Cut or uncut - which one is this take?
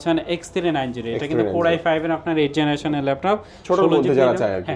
uncut